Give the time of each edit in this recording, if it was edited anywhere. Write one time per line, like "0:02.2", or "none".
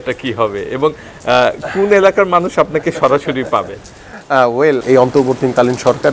none